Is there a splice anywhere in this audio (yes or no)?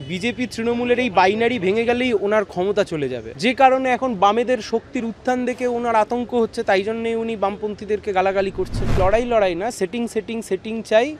yes